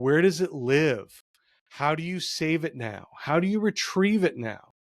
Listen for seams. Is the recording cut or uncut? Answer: uncut